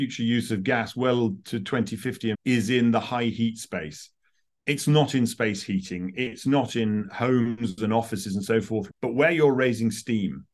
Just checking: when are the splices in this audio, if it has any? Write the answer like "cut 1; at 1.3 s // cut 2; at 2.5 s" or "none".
cut 1; at 2.4 s // cut 2; at 8.9 s